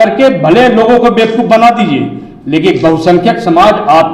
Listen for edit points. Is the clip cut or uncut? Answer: uncut